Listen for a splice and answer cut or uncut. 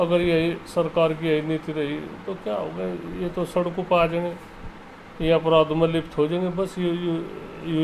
uncut